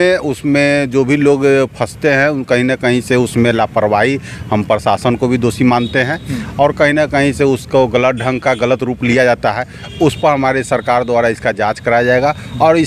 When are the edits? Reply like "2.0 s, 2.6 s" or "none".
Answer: none

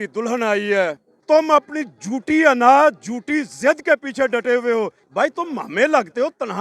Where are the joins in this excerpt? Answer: 1.1 s, 5.0 s

